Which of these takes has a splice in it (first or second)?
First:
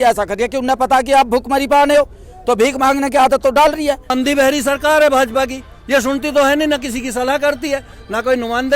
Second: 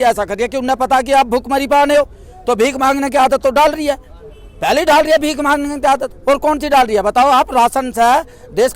first